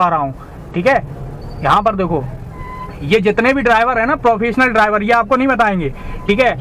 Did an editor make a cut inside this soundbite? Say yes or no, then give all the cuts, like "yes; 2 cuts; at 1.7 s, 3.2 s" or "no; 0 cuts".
no; 0 cuts